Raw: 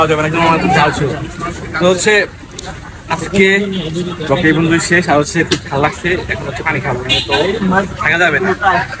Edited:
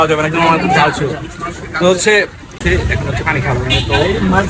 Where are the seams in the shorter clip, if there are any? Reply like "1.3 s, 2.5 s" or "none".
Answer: 2.6 s